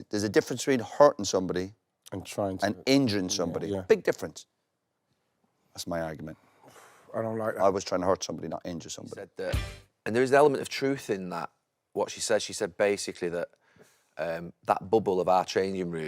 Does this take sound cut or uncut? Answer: cut